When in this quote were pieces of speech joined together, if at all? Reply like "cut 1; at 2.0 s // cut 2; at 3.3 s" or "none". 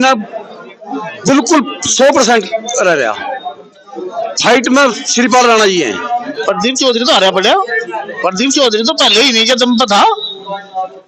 cut 1; at 6.3 s